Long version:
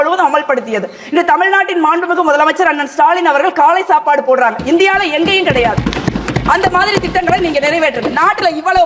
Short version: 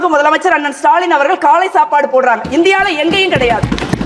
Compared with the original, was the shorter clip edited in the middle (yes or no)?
no